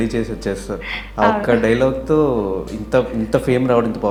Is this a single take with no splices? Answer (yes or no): yes